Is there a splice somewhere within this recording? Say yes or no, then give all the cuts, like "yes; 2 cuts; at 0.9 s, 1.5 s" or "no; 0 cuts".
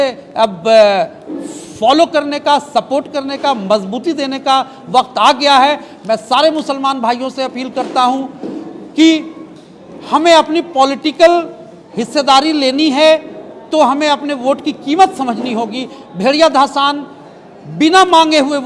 no; 0 cuts